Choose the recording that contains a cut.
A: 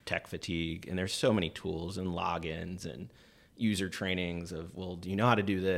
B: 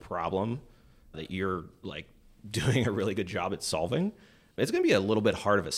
B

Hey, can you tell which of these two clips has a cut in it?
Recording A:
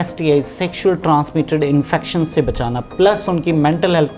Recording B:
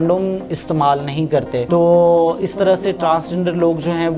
B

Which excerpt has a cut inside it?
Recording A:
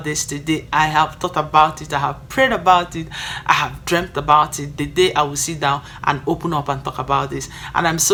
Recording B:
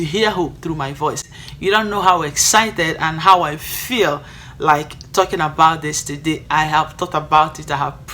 B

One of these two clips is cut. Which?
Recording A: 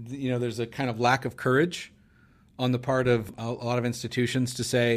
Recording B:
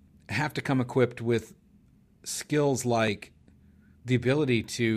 A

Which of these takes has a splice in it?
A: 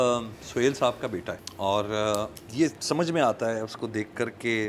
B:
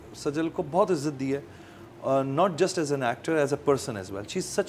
A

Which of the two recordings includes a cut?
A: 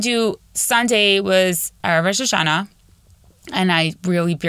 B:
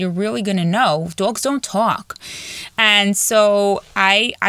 A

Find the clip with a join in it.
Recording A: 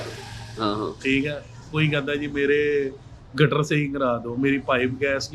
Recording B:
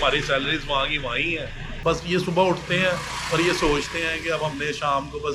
B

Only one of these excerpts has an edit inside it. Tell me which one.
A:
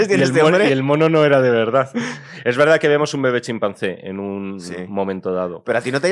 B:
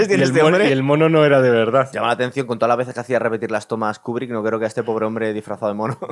B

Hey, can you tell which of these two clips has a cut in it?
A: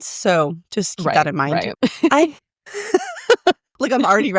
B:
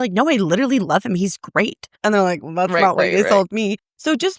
A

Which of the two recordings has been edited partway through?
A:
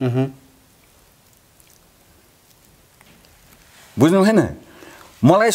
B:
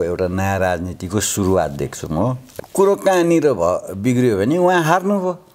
B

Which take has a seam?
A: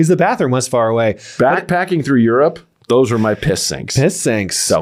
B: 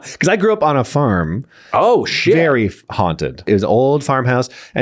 B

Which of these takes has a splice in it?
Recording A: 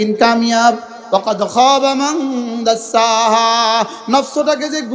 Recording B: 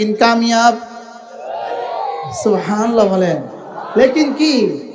A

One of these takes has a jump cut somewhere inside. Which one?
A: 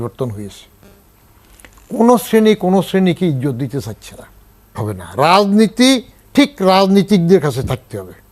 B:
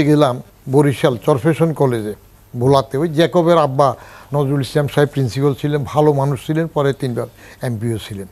A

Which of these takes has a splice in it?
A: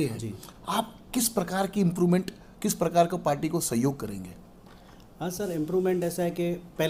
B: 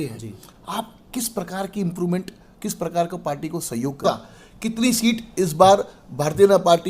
B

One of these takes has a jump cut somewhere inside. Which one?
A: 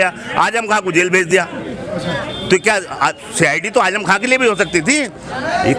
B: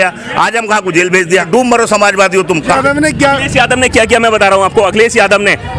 B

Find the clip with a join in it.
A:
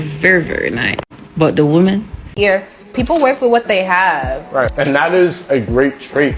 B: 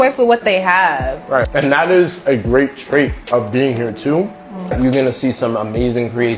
A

